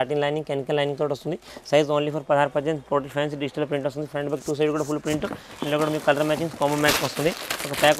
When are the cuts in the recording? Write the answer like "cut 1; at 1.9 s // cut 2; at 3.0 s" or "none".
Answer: none